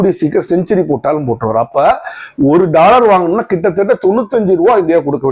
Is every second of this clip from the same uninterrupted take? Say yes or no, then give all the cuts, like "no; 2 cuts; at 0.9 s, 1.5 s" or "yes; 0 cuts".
yes; 0 cuts